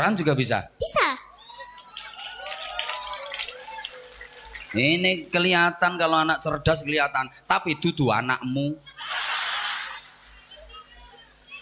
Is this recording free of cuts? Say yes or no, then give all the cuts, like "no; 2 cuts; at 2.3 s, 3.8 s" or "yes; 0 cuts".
yes; 0 cuts